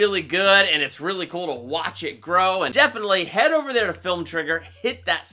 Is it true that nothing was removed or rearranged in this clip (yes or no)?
no